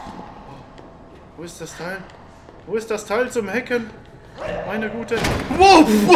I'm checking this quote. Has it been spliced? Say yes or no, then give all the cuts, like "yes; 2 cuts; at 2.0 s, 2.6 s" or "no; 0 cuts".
no; 0 cuts